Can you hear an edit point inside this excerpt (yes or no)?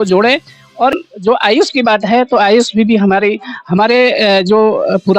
yes